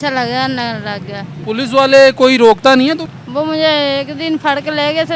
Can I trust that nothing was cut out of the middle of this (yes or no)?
no